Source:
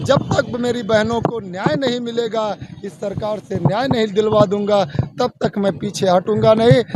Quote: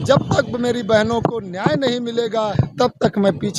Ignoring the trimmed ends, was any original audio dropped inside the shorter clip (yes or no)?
yes